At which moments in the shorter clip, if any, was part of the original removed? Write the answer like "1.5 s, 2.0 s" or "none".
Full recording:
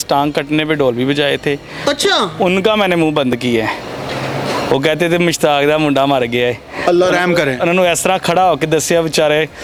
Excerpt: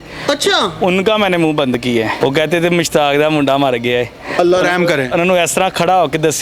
2.2 s